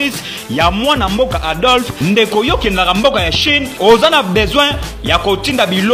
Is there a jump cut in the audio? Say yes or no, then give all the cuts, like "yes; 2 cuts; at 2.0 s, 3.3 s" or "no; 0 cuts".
no; 0 cuts